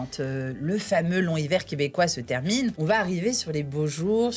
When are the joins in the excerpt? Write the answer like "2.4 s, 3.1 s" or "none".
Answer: 2.8 s